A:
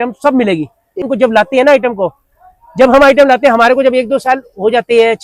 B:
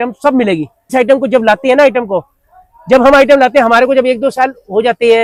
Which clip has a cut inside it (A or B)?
A